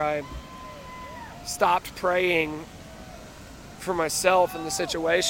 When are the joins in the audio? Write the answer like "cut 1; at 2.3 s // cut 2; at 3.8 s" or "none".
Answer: cut 1; at 3.8 s